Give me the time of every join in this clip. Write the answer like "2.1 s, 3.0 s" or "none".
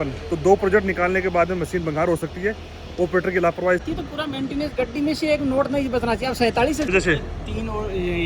3.8 s, 6.9 s